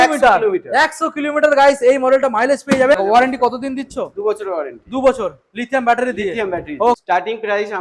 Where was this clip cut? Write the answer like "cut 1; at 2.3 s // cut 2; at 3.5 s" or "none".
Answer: cut 1; at 2.9 s // cut 2; at 7.0 s